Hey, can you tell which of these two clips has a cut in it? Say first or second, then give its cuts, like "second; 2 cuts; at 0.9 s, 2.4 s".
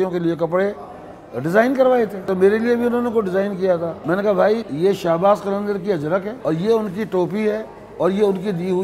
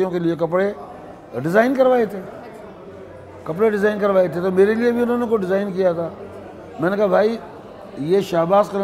first; 4 cuts; at 2.2 s, 4.0 s, 4.7 s, 6.3 s